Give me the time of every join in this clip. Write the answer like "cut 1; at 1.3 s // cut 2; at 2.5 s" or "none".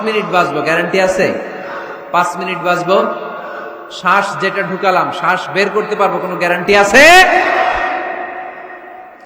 none